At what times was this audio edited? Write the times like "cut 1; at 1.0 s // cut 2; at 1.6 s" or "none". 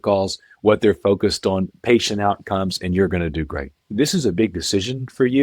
cut 1; at 3.8 s